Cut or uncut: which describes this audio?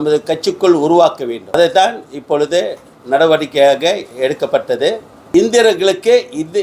cut